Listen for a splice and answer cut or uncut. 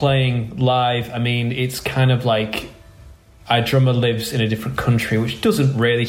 uncut